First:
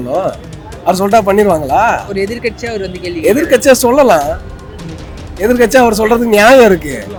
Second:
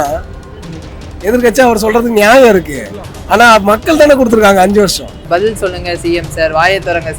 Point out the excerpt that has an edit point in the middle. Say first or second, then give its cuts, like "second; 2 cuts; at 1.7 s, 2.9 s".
second; 1 cut; at 5.1 s